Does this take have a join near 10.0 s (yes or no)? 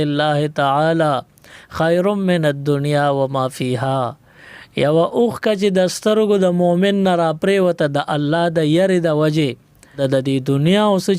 yes